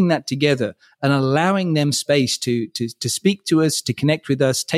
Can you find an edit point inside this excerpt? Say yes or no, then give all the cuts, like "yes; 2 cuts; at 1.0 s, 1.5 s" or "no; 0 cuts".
no; 0 cuts